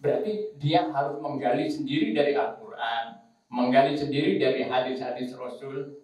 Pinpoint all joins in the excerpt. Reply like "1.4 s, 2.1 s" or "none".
none